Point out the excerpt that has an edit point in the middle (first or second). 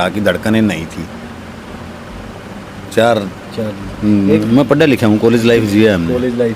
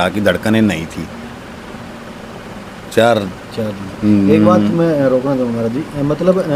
first